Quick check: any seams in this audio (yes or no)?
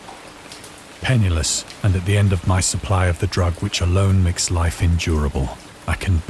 yes